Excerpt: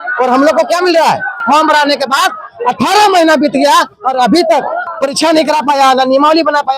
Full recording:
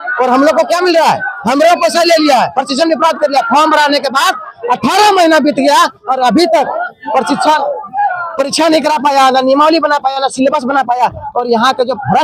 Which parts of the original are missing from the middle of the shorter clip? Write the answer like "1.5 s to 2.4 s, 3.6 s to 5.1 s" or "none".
1.4 s to 3.5 s, 6.9 s to 8.2 s